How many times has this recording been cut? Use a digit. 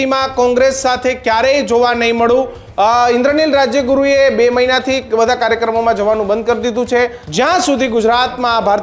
2